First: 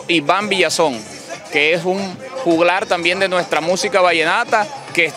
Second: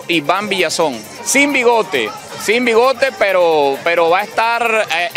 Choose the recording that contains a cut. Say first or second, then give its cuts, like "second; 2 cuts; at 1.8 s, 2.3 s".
second; 1 cut; at 1.1 s